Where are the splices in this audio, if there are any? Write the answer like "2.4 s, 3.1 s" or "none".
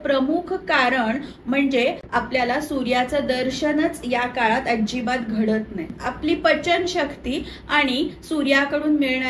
none

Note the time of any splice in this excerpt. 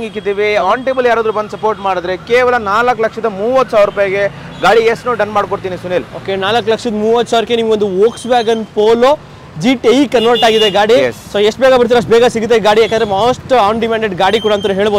none

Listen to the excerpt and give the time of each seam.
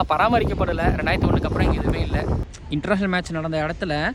2.4 s

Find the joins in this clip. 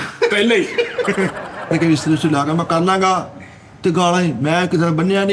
1.7 s

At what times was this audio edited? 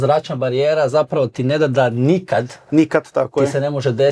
none

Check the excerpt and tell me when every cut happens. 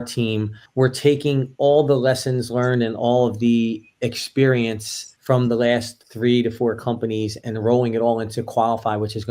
none

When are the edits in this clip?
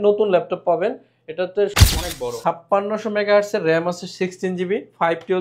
1.8 s

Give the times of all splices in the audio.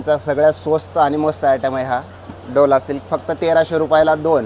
none

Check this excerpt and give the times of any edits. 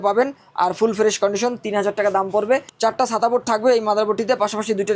2.7 s

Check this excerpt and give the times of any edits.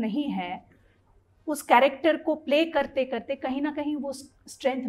none

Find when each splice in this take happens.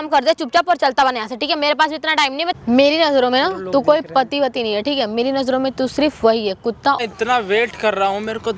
2.5 s, 7.0 s

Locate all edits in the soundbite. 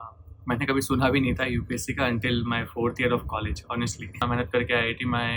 4.2 s

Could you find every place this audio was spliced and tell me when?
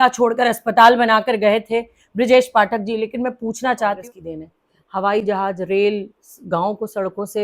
4.0 s

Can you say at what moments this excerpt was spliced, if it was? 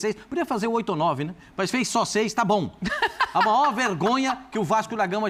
none

